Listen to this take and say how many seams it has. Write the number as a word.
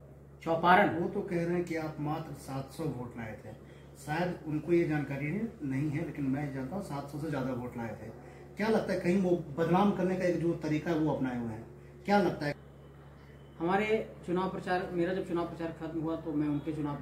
one